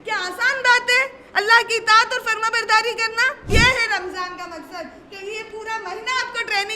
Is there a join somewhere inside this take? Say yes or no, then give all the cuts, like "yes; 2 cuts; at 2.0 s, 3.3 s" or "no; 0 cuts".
yes; 1 cut; at 3.5 s